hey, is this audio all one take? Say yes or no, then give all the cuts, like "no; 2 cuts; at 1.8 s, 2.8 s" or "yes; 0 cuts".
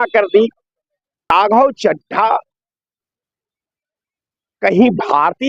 no; 1 cut; at 1.3 s